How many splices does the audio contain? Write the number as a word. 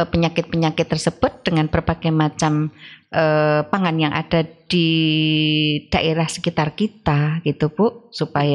zero